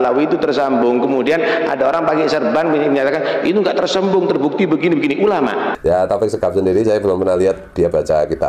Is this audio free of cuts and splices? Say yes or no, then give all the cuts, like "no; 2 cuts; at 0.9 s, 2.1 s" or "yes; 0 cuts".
no; 1 cut; at 5.8 s